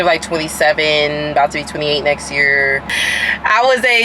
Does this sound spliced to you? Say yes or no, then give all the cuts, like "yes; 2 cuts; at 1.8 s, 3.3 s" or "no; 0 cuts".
yes; 1 cut; at 2.8 s